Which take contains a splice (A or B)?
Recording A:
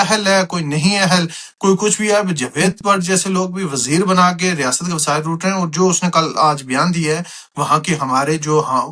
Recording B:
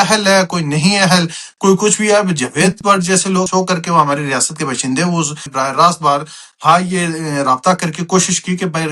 B